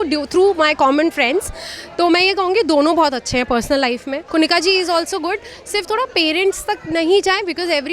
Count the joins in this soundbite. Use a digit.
1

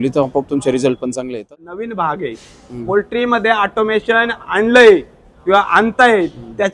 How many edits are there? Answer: 1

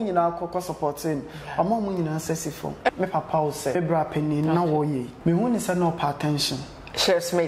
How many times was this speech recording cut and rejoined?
3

